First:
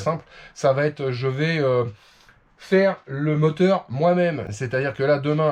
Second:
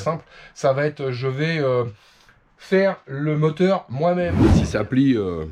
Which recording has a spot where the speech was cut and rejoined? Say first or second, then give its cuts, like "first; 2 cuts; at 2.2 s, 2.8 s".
second; 1 cut; at 4.5 s